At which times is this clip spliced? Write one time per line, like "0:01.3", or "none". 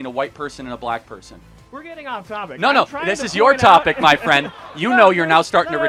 none